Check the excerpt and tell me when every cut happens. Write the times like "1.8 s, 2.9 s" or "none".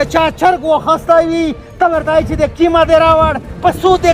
none

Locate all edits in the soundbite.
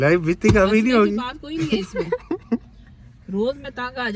none

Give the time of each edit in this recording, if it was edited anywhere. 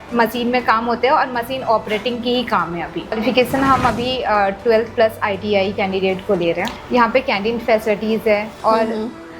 3.1 s, 6.7 s

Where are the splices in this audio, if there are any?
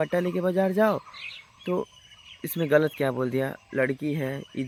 none

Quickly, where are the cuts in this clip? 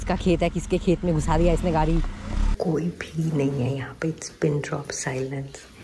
2.4 s

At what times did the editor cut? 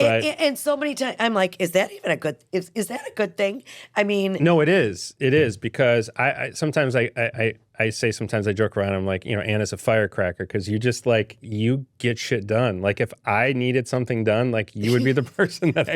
none

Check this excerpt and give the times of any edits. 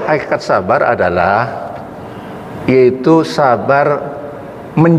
none

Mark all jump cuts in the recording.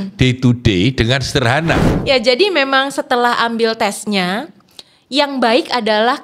1.9 s

